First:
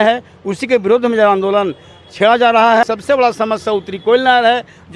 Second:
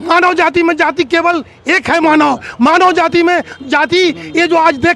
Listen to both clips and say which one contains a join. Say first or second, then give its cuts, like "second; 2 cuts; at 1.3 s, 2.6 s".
first; 1 cut; at 2.8 s